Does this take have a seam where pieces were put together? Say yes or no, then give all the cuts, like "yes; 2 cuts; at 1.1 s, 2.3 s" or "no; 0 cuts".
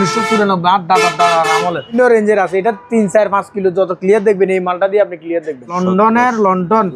yes; 2 cuts; at 1.9 s, 5.7 s